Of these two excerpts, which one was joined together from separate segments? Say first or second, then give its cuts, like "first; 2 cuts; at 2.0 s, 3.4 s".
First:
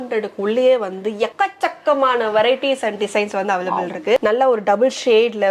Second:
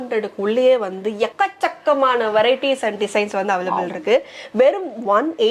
first; 1 cut; at 4.2 s